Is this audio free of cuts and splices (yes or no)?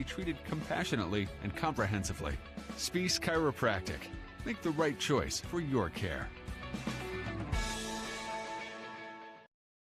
yes